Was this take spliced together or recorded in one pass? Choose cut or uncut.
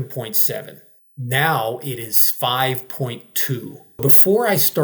cut